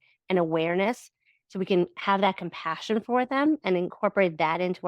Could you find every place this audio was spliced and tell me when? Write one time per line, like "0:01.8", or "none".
0:03.9